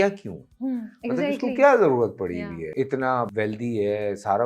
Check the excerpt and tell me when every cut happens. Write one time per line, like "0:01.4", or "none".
0:02.6
0:03.3